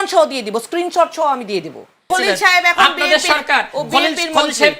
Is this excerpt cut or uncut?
cut